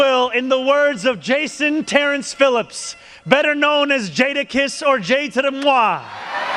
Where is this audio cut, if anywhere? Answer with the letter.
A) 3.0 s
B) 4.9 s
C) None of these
C